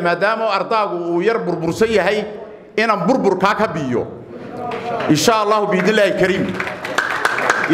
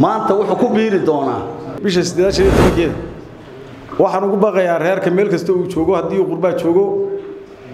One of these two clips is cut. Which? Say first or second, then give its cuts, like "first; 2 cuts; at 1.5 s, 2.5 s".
second; 1 cut; at 1.6 s